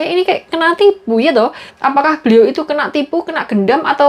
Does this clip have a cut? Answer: yes; 1 cut; at 1.7 s

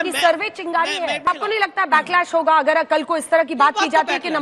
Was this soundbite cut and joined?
yes; 1 cut; at 1.3 s

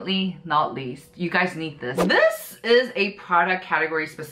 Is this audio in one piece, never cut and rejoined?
no; 1 cut; at 2.0 s

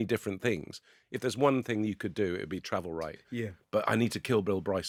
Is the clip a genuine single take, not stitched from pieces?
yes; 0 cuts

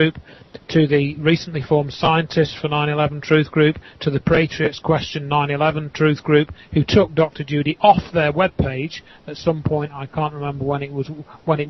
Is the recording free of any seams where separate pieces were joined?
no; 1 cut; at 5.1 s

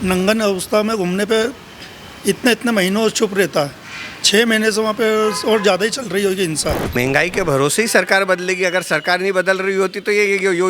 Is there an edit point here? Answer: yes; 1 cut; at 6.9 s

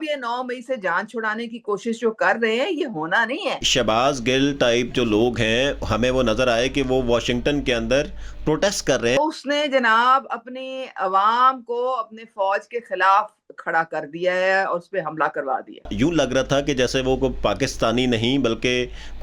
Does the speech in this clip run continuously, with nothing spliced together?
no; 3 cuts; at 3.7 s, 9.2 s, 15.9 s

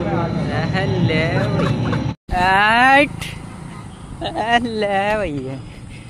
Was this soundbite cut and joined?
yes; 1 cut; at 2.2 s

